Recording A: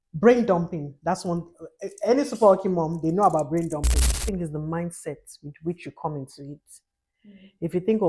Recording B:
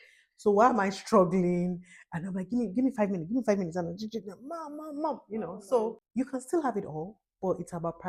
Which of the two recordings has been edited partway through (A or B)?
A